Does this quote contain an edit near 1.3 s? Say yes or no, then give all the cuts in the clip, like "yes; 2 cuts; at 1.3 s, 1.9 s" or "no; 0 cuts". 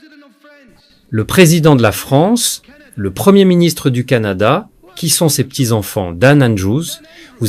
yes; 1 cut; at 1.3 s